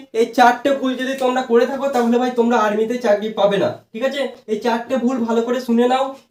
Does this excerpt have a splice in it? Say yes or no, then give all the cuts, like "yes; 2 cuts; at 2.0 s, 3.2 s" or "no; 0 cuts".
no; 0 cuts